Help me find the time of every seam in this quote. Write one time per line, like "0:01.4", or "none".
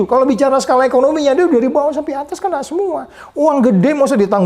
none